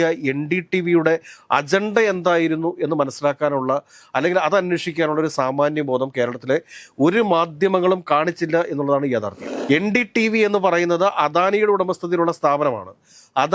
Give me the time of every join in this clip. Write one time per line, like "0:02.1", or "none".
0:09.5